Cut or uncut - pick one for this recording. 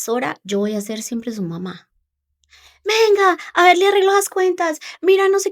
uncut